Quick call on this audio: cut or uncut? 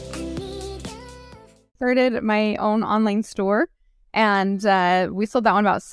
cut